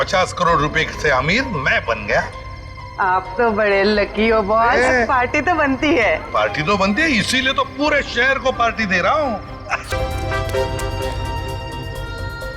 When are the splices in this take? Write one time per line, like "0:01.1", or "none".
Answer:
0:09.9